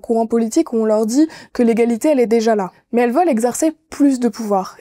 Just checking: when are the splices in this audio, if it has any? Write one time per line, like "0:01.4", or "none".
0:02.8